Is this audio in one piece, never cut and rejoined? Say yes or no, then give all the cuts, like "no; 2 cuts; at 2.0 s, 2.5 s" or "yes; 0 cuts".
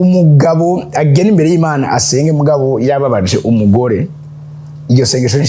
yes; 0 cuts